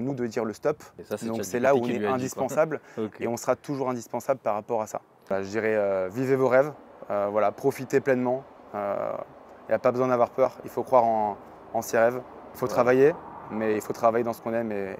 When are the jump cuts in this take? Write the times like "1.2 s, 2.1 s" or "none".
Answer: 0.9 s, 5.3 s, 12.6 s